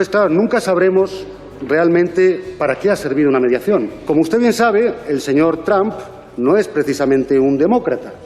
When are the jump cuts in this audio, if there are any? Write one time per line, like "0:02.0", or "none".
0:03.9